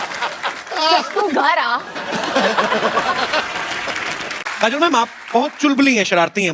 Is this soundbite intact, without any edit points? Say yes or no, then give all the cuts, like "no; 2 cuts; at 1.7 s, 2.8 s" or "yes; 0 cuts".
no; 1 cut; at 4.4 s